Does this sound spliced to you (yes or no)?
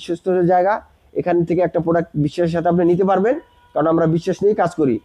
no